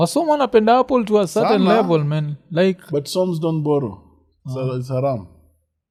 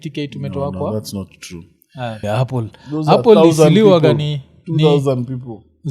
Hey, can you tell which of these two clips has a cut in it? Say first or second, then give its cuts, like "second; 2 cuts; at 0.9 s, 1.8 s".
second; 1 cut; at 2.2 s